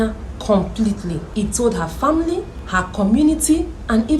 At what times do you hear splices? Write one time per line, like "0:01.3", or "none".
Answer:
0:01.2
0:02.6